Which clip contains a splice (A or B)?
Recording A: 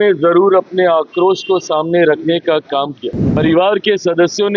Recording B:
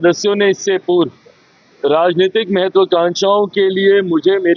A